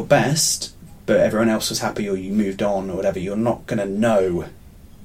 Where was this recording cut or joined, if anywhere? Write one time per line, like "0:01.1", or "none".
none